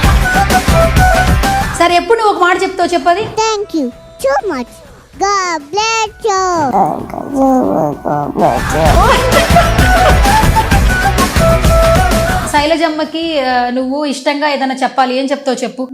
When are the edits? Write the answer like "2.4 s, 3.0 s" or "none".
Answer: 1.7 s, 12.5 s